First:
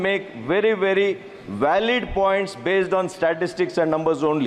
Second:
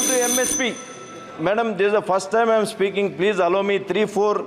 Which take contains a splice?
second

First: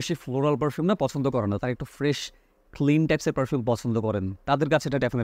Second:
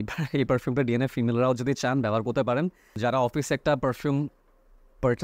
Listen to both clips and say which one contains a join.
second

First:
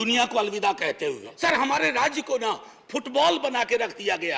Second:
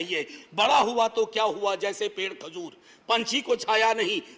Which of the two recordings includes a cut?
first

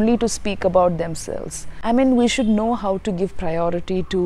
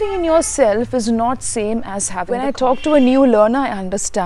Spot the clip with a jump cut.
second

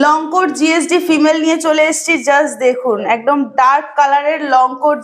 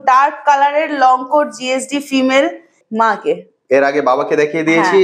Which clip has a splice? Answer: second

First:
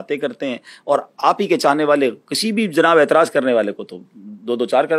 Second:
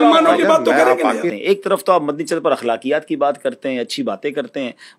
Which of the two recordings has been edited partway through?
second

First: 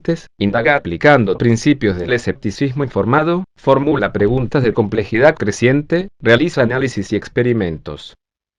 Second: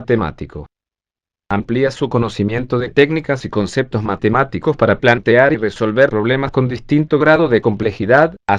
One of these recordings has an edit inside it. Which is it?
second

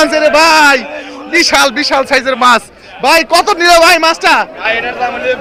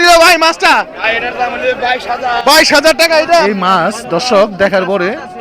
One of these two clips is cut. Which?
second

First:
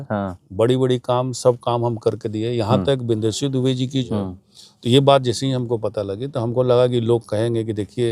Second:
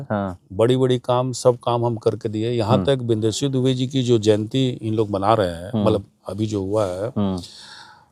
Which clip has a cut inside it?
first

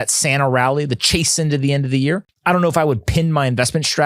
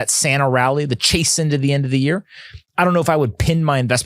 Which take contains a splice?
first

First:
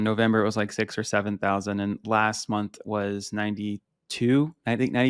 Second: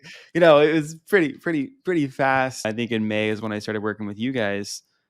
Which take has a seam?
second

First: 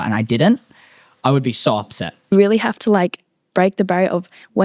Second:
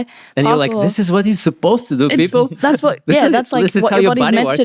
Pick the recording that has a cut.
first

